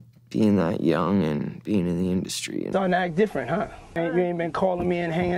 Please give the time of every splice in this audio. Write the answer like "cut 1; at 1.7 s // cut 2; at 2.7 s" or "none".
cut 1; at 2.7 s // cut 2; at 4.0 s